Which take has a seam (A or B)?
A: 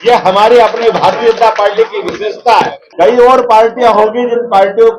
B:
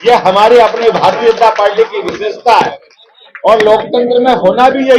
A